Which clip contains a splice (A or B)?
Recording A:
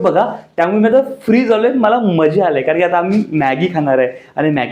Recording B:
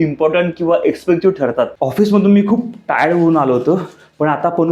B